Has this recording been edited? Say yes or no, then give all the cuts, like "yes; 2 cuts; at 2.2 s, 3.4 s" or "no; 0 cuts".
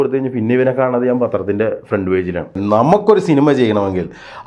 yes; 1 cut; at 2.6 s